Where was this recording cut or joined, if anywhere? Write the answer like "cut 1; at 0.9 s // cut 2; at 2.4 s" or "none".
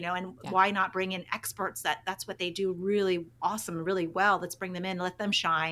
cut 1; at 3.3 s